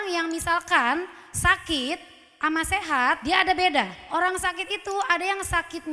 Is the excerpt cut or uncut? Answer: cut